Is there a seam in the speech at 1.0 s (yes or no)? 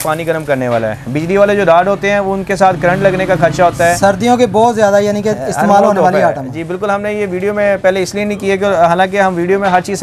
no